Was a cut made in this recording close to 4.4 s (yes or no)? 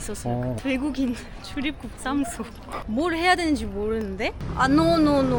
yes